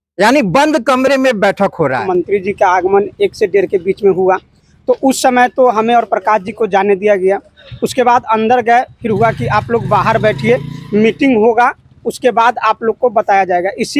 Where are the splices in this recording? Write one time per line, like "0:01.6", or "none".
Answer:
0:02.0